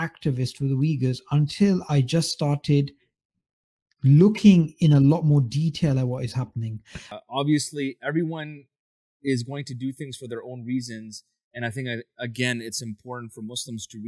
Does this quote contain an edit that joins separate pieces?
yes; 1 cut; at 7.1 s

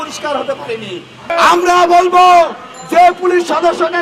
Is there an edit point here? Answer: yes; 1 cut; at 1.3 s

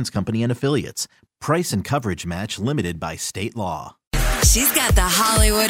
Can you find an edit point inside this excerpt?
yes; 1 cut; at 4.0 s

